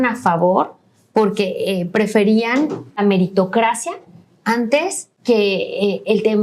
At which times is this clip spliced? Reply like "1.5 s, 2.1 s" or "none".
3.0 s, 5.1 s